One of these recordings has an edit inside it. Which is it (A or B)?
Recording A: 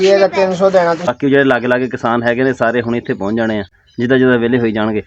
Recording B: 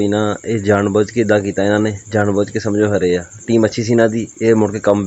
A